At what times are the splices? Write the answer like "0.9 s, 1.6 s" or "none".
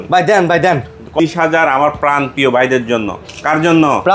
1.2 s

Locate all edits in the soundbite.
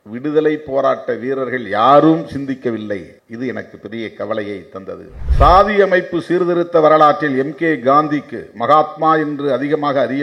5.2 s

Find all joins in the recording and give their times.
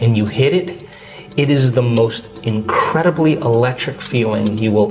none

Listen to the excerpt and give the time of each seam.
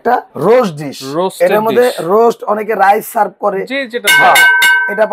none

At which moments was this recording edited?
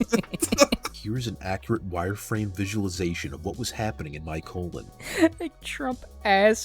0.9 s, 4.9 s

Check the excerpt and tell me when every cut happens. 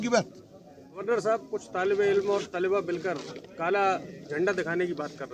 0.9 s

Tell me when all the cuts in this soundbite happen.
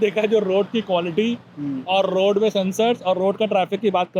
none

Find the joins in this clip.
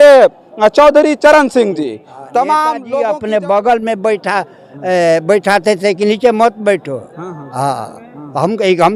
3.0 s

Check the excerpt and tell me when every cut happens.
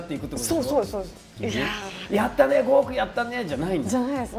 1.3 s

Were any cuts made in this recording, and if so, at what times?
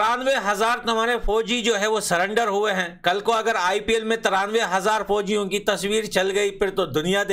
none

